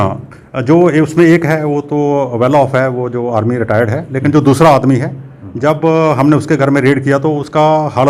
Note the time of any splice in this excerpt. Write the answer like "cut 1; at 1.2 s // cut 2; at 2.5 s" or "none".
none